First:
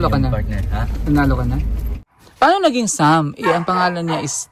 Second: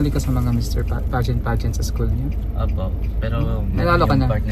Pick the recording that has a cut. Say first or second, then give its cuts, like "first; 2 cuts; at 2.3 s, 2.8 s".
first; 1 cut; at 2.0 s